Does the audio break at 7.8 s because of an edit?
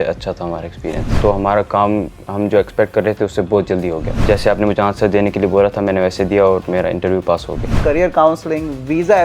yes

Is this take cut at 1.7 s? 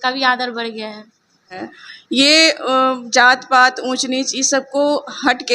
yes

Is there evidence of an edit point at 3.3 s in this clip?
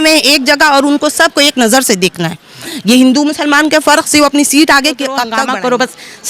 no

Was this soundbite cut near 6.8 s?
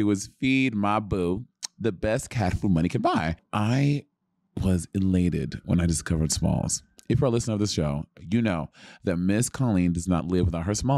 no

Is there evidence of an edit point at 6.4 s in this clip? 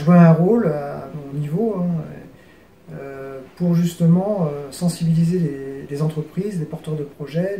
no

